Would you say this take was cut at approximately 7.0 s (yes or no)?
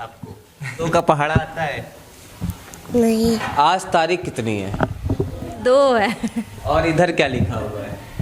no